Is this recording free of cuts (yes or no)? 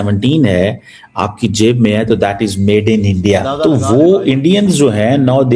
no